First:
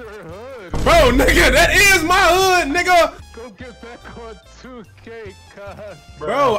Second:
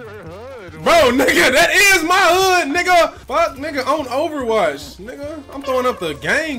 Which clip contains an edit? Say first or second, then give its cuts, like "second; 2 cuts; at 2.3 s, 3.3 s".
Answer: first; 1 cut; at 3.3 s